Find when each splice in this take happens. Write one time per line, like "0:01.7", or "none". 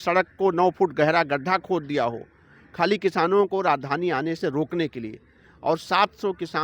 none